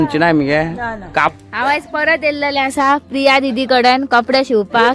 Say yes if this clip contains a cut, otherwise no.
yes